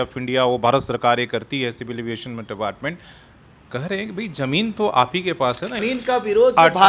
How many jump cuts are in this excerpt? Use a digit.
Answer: 1